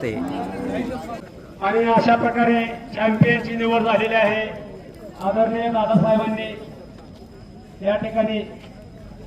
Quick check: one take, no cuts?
no; 1 cut; at 1.2 s

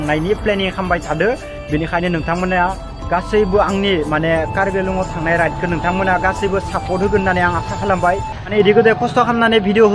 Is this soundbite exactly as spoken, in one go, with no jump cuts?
no; 1 cut; at 8.5 s

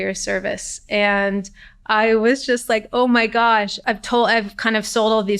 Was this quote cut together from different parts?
yes; 1 cut; at 3.8 s

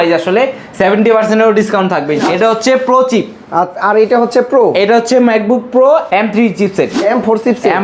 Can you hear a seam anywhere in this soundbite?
yes; 2 cuts; at 2.2 s, 7.0 s

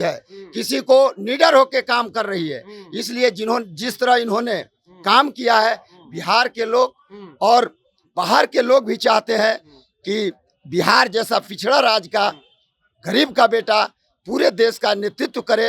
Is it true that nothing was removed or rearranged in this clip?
yes; 0 cuts

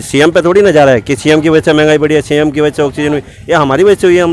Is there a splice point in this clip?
no; 0 cuts

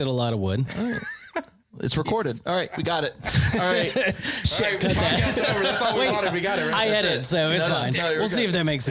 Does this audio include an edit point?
no; 0 cuts

